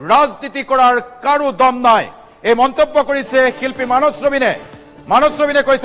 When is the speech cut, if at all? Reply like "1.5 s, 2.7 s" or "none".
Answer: none